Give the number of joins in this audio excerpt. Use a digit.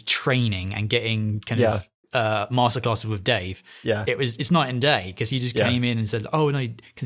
0